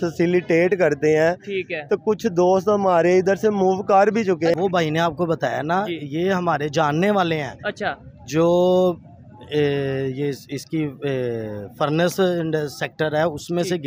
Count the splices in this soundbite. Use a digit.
1